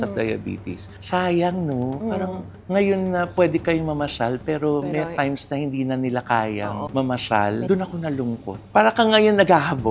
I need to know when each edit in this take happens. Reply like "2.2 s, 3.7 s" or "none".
0.9 s, 7.6 s, 8.6 s